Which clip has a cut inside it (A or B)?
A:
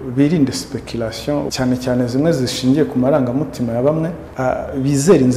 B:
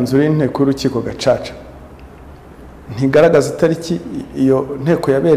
A